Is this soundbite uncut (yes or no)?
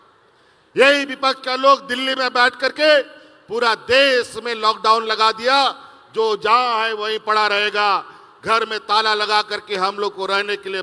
yes